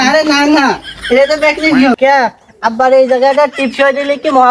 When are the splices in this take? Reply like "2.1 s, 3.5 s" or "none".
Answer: 1.9 s